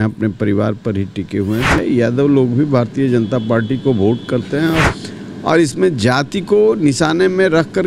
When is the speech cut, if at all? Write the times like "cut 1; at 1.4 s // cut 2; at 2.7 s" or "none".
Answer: cut 1; at 1.8 s // cut 2; at 4.9 s